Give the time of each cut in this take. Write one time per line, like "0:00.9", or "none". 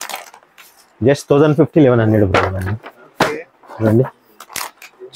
none